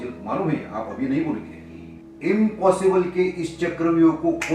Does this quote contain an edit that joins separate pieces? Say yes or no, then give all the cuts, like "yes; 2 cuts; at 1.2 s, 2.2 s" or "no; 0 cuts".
yes; 1 cut; at 2.0 s